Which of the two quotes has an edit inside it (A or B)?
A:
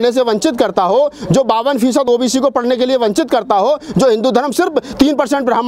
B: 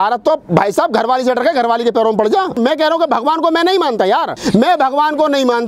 B